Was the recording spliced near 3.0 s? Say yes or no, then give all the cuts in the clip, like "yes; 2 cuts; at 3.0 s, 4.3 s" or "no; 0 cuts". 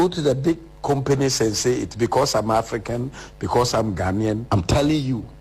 no; 1 cut; at 4.4 s